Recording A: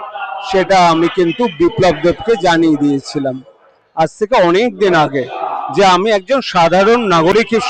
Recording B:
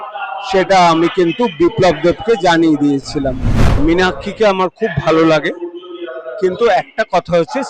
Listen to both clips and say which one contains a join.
B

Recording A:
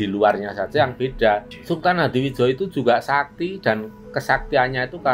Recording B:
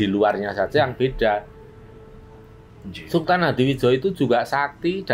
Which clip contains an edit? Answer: A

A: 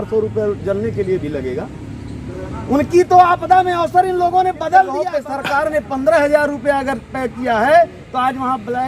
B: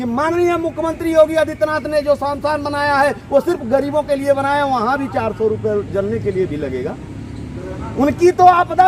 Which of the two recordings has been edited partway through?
A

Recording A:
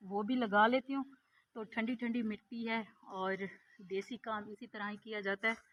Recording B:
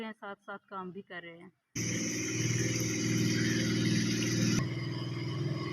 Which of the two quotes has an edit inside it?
B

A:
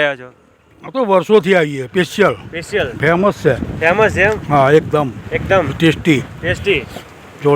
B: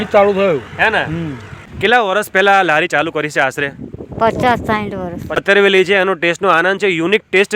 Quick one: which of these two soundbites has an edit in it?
B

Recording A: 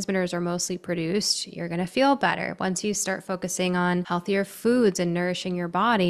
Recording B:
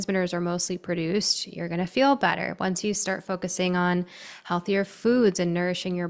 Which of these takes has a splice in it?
A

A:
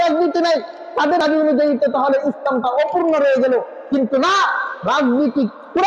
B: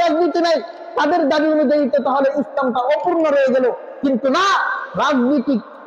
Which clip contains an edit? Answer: A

